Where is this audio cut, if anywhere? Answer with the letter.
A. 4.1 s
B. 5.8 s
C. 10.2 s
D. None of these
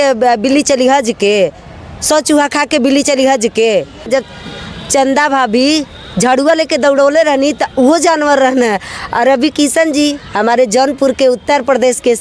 A